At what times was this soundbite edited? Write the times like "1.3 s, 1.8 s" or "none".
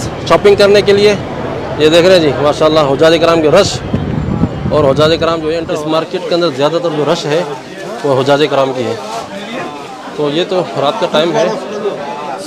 5.6 s